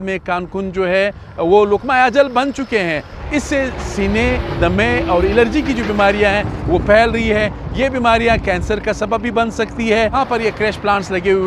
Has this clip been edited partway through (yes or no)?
yes